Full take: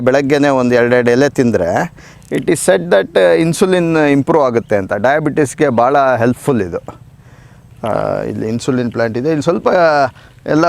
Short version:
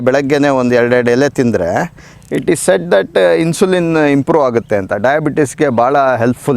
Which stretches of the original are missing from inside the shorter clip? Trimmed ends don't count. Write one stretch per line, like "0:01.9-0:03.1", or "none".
none